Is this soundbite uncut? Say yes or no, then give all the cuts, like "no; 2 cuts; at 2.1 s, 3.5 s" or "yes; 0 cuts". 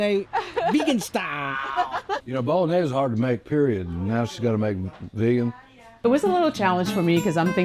no; 2 cuts; at 2.2 s, 6.0 s